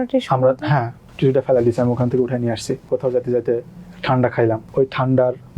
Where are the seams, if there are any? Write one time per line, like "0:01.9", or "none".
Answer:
0:01.0
0:02.9
0:04.6